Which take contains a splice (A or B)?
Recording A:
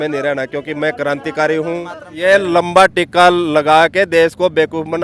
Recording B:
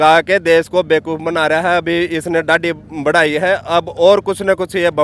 A